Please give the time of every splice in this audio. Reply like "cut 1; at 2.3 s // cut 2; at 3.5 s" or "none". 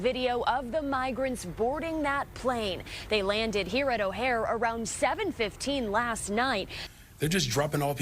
cut 1; at 6.8 s